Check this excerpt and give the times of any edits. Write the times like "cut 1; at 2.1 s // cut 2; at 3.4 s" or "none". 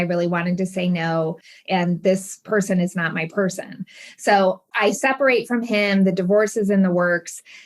cut 1; at 1.6 s // cut 2; at 4.7 s